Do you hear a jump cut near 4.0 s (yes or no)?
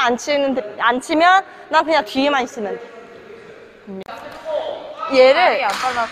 yes